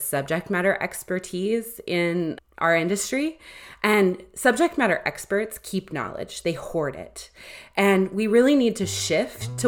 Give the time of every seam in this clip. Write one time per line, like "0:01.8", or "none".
0:02.4

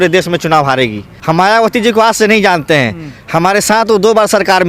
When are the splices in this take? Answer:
0:01.1

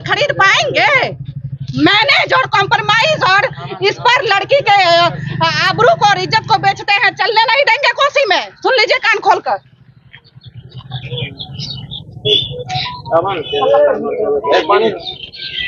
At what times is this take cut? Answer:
none

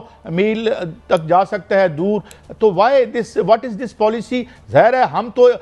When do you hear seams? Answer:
none

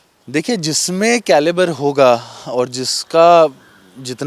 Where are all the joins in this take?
none

